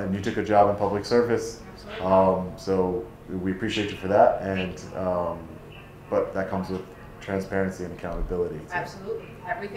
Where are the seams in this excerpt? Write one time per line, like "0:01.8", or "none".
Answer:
none